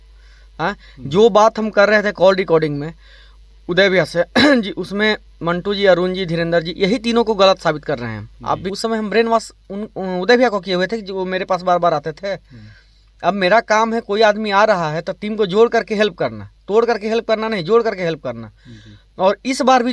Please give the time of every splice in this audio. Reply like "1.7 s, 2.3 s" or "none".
8.7 s